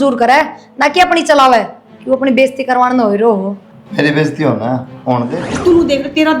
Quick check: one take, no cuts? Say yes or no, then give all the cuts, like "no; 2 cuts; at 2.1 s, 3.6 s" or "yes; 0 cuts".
no; 1 cut; at 5.4 s